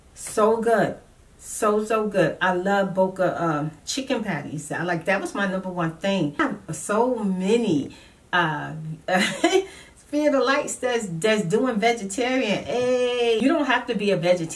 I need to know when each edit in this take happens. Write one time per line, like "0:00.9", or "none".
0:06.4
0:13.4

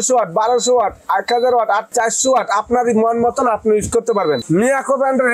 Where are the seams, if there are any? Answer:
0:01.9
0:04.4

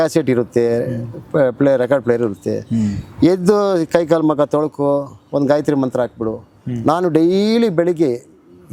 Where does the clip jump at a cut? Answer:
none

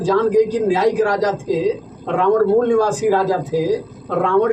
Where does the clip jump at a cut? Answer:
none

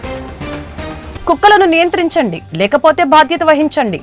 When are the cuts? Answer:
0:01.0

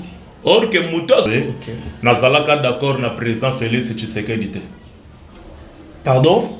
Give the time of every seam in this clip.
0:01.3

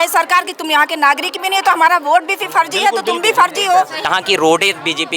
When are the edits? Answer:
0:04.0

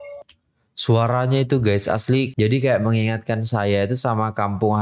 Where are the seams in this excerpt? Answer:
0:02.3

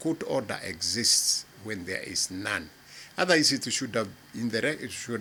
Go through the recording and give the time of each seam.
none

